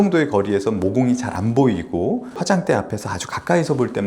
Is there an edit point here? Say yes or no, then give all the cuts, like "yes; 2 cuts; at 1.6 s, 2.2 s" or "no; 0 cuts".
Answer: yes; 2 cuts; at 1.3 s, 2.4 s